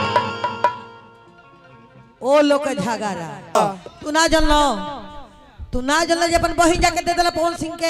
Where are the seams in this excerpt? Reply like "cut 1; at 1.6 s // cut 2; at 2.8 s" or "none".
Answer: cut 1; at 3.6 s